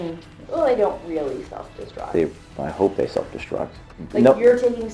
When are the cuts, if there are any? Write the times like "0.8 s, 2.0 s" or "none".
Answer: 3.8 s